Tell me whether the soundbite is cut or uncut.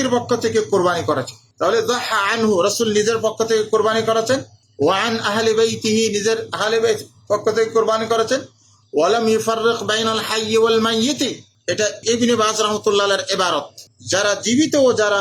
cut